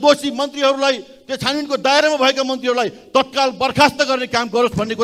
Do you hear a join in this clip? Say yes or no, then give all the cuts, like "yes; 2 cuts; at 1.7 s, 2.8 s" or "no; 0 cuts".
no; 0 cuts